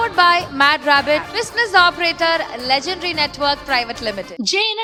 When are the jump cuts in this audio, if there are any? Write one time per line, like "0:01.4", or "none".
none